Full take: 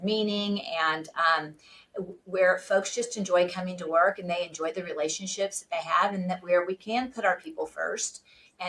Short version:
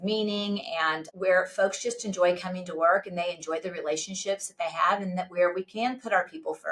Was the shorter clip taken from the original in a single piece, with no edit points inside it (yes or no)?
no